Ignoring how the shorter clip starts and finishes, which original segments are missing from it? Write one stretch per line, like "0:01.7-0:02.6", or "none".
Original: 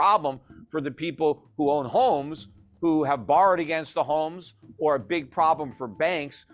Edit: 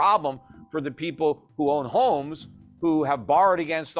none